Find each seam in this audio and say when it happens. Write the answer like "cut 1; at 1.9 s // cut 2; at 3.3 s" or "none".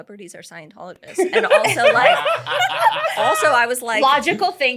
none